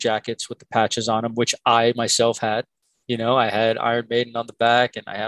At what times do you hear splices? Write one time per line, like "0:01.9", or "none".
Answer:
none